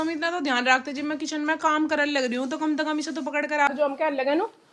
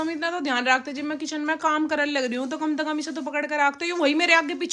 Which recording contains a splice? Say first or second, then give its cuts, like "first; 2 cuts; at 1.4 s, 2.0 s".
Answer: first; 1 cut; at 3.7 s